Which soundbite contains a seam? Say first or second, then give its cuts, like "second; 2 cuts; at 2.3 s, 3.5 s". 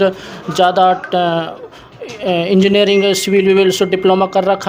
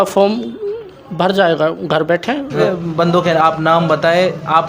second; 1 cut; at 2.6 s